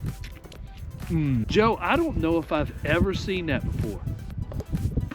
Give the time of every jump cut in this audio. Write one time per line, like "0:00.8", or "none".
0:01.5